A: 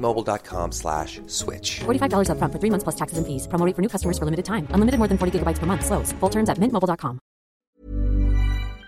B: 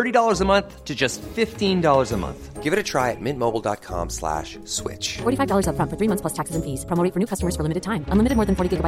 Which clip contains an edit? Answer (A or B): A